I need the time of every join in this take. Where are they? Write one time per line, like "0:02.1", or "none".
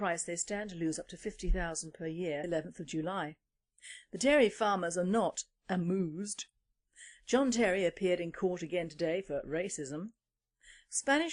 none